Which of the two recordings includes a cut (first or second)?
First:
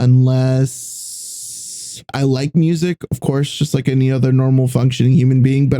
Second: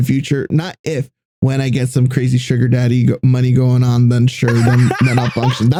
first